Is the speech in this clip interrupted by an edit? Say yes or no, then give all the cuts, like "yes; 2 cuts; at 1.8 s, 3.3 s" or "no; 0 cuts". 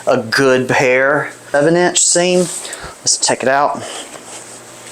yes; 1 cut; at 1.5 s